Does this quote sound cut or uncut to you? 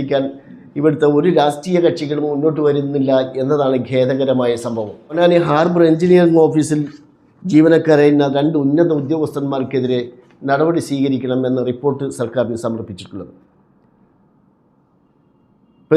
cut